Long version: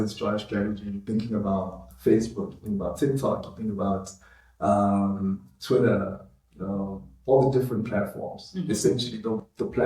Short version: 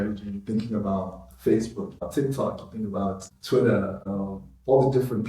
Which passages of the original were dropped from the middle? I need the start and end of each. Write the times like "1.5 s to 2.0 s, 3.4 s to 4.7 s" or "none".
2.6 s to 2.9 s, 4.2 s to 5.5 s, 6.2 s to 6.6 s